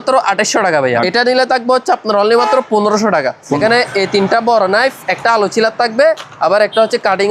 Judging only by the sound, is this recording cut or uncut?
cut